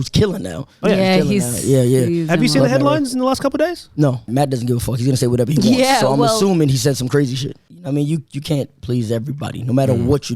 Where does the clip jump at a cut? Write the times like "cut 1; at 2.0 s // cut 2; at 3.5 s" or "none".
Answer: cut 1; at 4.3 s // cut 2; at 7.6 s